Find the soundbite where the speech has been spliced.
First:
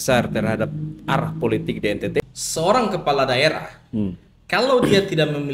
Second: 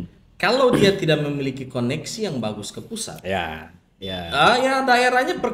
first; 1 cut; at 2.2 s

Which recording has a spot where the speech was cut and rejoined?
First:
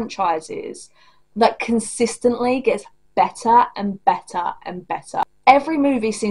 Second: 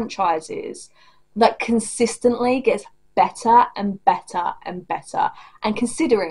first; 1 cut; at 5.3 s

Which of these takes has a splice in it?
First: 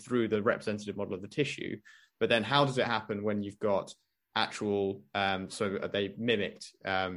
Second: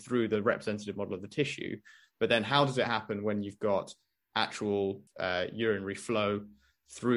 second; 1 cut; at 5.0 s

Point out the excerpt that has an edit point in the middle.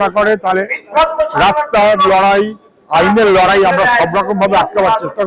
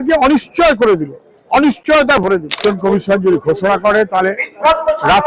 second; 1 cut; at 2.6 s

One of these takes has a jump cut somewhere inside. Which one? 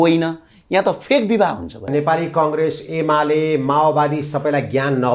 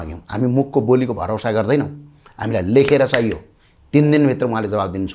first; 1 cut; at 1.9 s

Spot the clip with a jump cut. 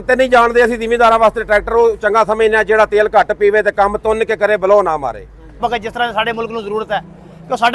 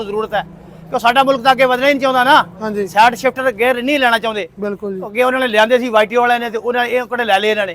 first; 1 cut; at 5.6 s

